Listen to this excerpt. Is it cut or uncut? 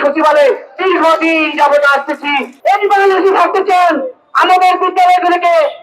cut